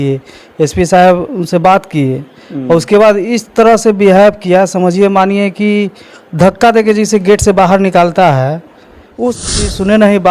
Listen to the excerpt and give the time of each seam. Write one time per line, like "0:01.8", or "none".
0:09.4

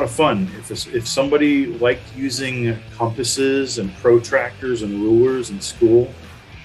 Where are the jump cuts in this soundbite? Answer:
none

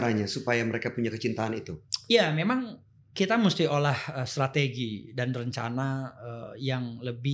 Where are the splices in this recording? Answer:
none

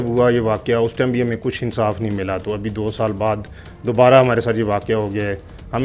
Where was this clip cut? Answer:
none

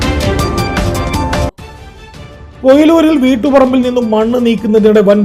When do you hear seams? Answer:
0:01.4

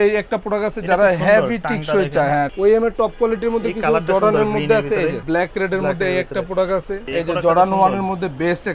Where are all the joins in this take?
0:02.5
0:05.2
0:07.1

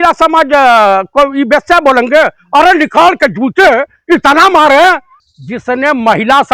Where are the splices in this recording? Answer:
0:05.1

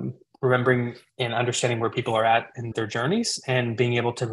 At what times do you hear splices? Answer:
0:02.7

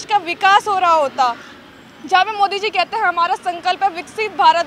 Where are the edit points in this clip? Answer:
none

